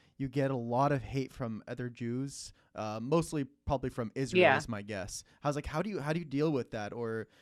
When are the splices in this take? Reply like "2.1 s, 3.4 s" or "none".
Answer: none